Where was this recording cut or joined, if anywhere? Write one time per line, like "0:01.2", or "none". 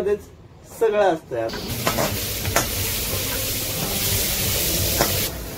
0:01.5